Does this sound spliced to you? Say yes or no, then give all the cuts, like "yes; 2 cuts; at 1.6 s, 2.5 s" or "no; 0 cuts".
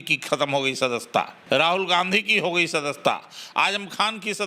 yes; 1 cut; at 1.4 s